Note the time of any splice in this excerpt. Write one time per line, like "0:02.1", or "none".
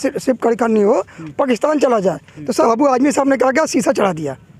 0:02.6